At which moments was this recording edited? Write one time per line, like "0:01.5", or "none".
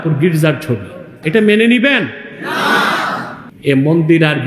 0:01.2
0:03.4